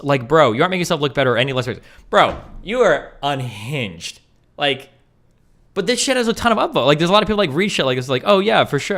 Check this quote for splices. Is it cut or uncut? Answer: uncut